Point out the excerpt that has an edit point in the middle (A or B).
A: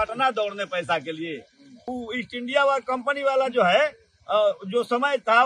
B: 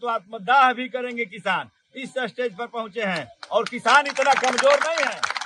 A